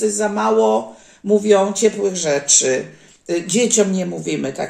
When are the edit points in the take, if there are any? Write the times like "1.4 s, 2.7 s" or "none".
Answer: none